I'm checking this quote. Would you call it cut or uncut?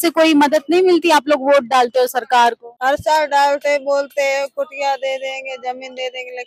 cut